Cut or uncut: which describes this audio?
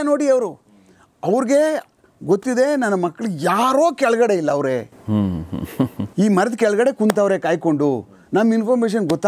uncut